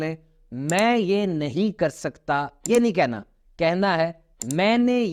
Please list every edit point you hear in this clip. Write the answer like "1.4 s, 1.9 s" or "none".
none